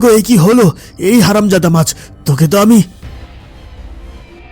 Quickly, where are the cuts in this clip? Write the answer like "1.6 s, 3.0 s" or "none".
none